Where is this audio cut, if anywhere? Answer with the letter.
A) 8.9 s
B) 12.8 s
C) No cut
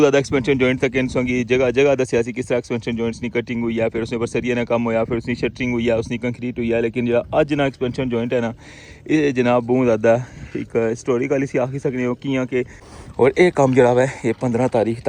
B